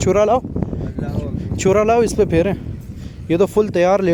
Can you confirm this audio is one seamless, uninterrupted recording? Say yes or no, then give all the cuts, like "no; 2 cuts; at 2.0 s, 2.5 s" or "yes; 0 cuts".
yes; 0 cuts